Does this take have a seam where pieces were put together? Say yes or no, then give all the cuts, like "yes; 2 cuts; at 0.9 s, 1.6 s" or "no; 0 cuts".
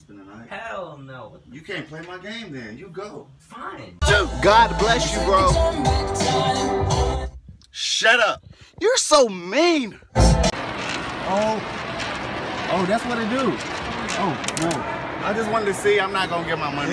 yes; 1 cut; at 10.1 s